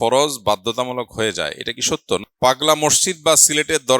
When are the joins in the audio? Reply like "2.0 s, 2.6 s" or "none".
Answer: 2.2 s